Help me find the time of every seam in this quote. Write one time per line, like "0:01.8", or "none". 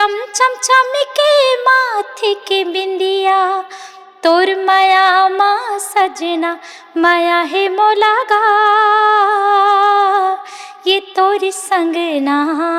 none